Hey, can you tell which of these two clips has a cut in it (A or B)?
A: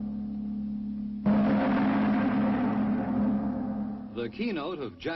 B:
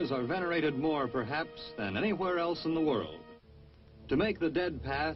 A